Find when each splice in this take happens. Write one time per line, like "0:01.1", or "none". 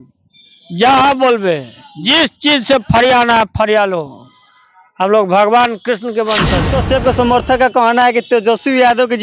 0:06.7